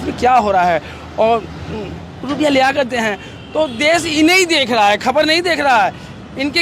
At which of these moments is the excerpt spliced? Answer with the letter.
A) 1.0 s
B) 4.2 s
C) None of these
C